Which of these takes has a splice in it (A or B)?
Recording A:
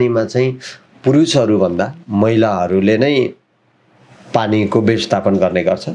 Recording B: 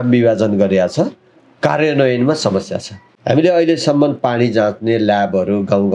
B